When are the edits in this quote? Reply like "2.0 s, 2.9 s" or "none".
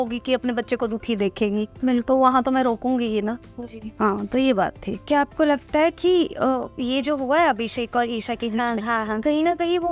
none